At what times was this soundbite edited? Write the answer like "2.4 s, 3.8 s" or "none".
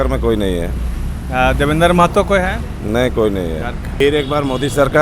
4.0 s